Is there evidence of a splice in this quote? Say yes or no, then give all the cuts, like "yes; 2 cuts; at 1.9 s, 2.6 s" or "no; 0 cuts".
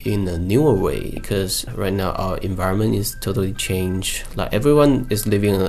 no; 0 cuts